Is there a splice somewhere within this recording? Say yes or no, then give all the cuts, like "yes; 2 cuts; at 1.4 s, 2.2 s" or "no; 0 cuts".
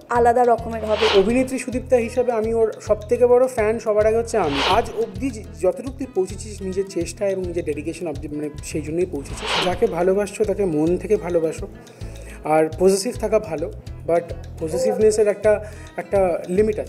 yes; 3 cuts; at 1.1 s, 4.6 s, 9.5 s